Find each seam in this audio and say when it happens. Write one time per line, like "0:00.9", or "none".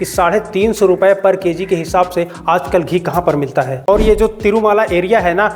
0:03.9